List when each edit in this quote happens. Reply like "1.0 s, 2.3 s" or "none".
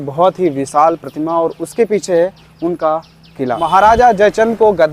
3.6 s

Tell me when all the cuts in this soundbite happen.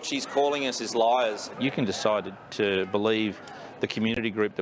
1.4 s

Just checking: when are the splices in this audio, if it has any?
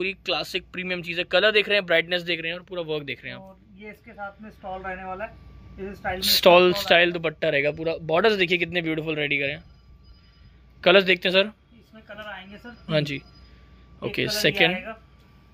none

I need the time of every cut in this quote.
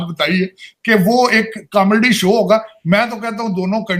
none

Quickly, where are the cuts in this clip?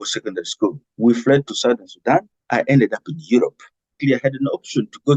0.8 s, 2.4 s, 4.0 s

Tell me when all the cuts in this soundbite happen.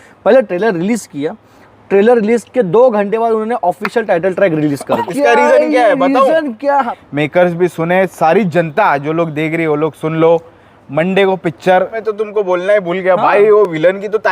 5.0 s, 7.0 s, 12.0 s

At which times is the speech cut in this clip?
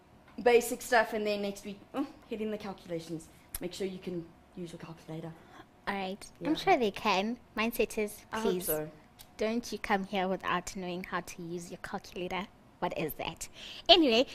3.7 s

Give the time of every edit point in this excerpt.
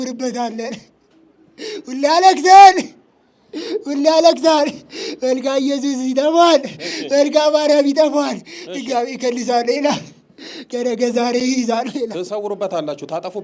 none

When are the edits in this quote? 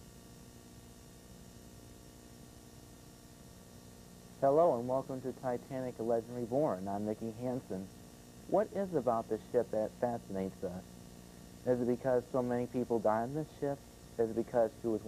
none

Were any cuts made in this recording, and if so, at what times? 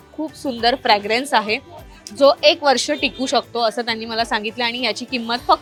none

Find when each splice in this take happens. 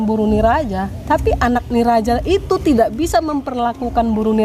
none

